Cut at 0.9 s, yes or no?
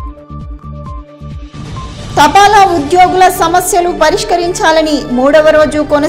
yes